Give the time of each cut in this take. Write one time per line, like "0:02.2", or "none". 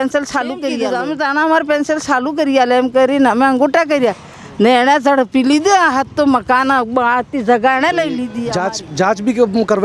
0:00.9
0:08.3